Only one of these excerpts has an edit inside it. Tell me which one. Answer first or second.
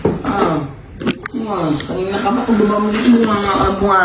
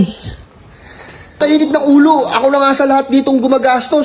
second